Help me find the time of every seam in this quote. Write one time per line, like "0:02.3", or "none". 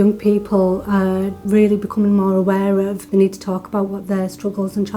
0:01.4
0:03.0